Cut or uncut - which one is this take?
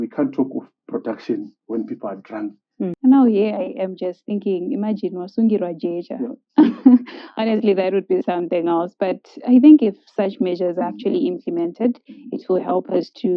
cut